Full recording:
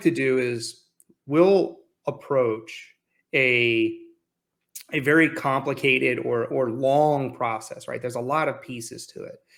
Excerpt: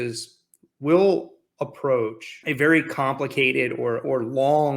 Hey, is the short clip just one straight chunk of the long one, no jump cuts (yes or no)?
no